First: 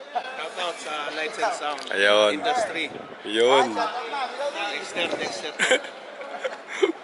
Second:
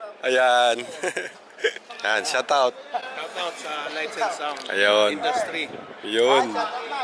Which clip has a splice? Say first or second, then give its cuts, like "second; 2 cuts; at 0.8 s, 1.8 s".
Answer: second; 1 cut; at 1.9 s